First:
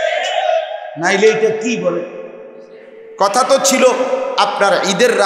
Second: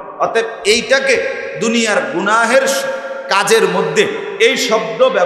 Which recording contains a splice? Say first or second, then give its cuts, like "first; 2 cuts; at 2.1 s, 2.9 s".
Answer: first; 1 cut; at 3.1 s